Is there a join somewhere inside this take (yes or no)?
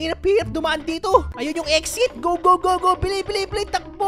yes